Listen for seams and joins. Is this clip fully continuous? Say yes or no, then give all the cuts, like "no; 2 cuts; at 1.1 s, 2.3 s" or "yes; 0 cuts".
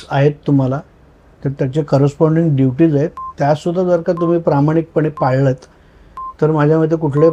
yes; 0 cuts